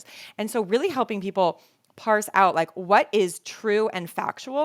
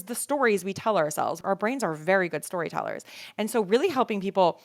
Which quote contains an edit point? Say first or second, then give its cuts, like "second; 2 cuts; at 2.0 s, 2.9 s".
second; 1 cut; at 1.4 s